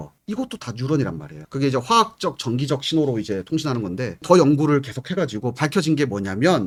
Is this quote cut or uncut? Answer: uncut